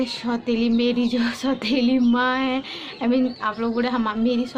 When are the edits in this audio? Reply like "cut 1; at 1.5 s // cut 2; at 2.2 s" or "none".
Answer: none